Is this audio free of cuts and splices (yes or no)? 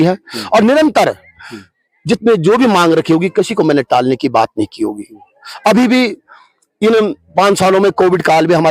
yes